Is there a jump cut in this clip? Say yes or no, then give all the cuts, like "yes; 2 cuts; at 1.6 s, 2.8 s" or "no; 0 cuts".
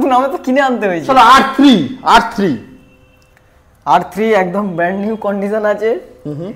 no; 0 cuts